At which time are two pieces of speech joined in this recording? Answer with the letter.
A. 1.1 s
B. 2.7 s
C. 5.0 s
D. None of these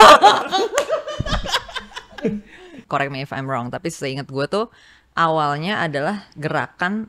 B